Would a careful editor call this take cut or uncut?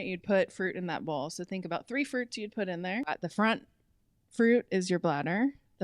cut